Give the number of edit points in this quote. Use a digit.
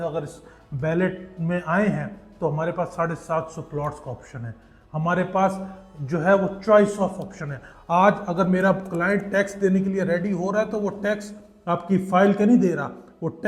0